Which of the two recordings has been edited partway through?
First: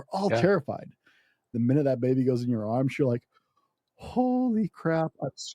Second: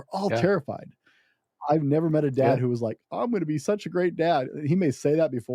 first; 1 cut; at 1.4 s

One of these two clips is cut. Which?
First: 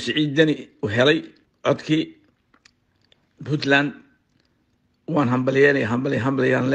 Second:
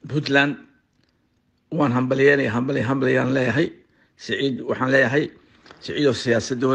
first; 1 cut; at 1.4 s

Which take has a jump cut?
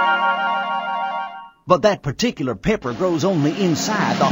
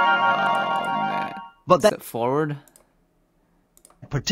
first; 1 cut; at 2.0 s

